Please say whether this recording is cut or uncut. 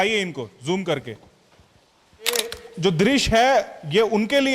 cut